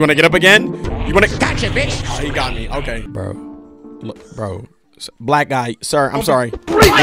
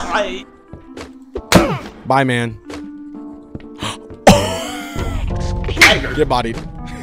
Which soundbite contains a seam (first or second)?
first